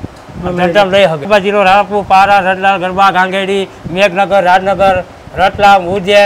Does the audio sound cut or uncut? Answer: cut